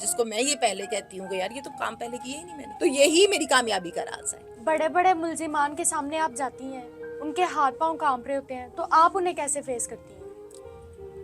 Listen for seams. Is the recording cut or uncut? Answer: cut